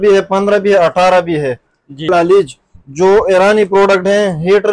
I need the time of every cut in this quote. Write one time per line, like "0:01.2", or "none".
0:02.1